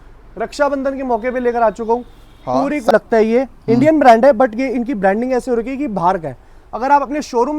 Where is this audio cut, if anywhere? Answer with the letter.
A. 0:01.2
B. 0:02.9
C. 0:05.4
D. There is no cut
B